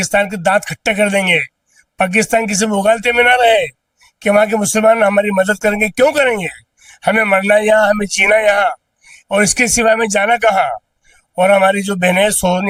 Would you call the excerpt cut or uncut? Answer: uncut